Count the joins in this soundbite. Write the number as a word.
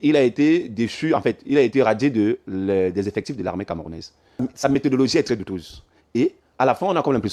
one